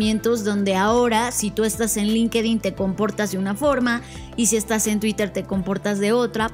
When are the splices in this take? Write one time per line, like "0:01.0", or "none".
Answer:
none